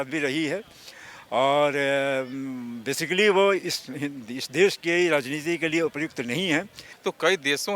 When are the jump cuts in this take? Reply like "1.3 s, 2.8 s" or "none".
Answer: 6.8 s